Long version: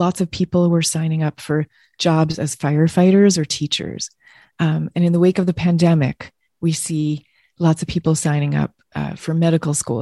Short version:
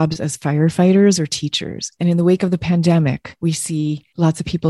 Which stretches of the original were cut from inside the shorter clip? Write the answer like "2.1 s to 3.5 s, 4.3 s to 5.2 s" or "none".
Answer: 4.1 s to 4.9 s, 6.8 s to 7.3 s